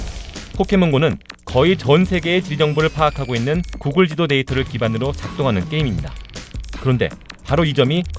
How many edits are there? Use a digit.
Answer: 0